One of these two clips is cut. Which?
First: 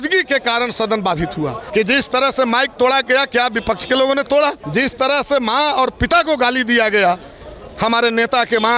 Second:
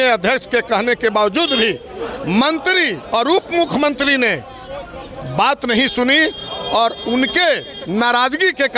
first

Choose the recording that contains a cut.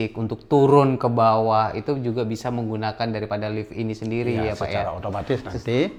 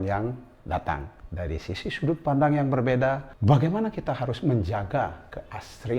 second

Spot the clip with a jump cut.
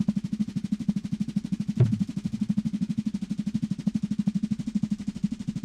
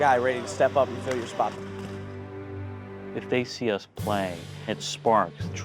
second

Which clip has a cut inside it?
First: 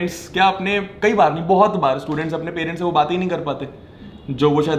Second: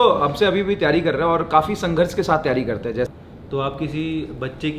second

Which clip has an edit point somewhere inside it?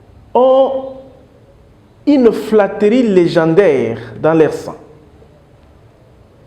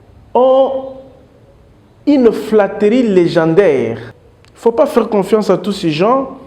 second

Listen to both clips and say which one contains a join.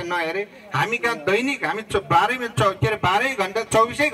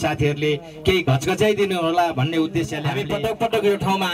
second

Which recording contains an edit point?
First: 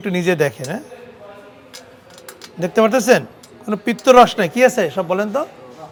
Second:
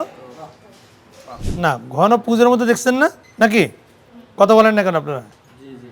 second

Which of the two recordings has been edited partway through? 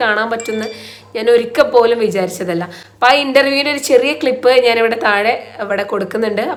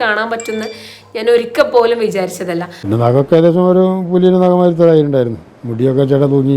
second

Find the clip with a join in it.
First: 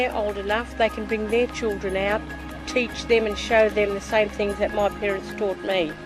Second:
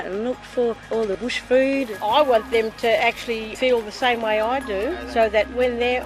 second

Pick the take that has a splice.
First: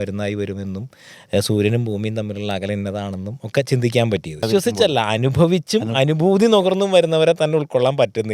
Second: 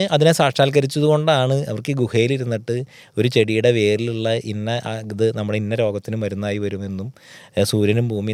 first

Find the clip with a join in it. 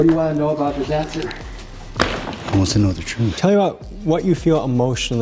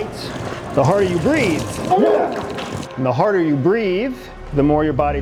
first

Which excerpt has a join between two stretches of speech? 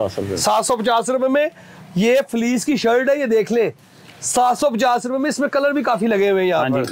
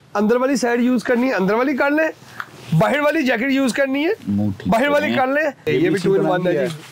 second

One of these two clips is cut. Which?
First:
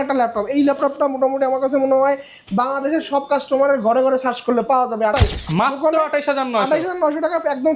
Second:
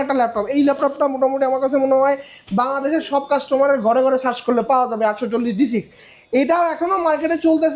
first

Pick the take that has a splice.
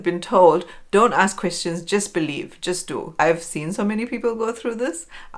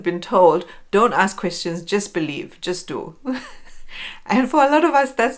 first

